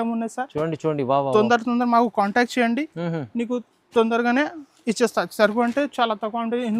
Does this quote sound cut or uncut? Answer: uncut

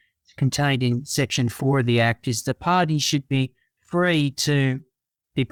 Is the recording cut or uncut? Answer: uncut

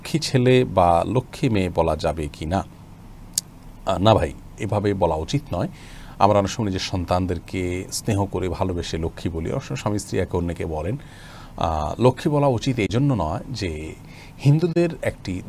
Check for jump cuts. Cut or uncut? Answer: uncut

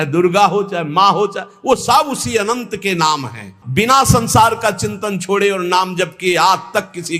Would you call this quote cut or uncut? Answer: cut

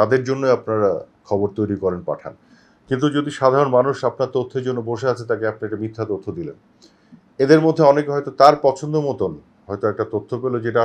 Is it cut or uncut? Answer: uncut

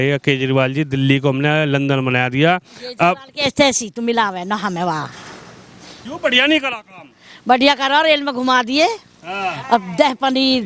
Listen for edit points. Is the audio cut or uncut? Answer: uncut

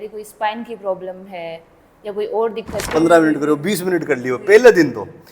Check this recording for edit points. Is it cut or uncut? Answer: cut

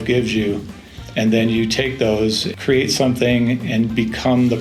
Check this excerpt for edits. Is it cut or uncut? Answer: cut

